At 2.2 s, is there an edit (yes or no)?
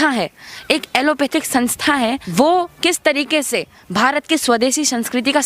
yes